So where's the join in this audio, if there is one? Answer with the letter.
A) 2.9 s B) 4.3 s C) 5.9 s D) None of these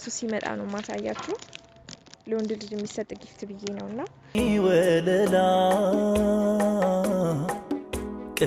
B